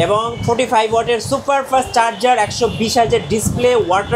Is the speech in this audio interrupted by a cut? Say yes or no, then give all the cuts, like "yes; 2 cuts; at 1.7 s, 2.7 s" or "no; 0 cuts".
no; 0 cuts